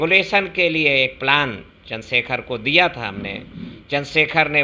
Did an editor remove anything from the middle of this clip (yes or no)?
no